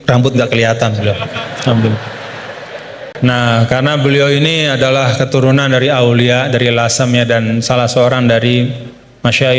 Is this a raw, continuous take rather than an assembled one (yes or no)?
no